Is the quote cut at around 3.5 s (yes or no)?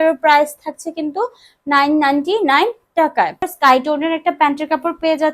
yes